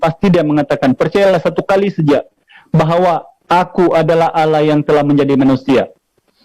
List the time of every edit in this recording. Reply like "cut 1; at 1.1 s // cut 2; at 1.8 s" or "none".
none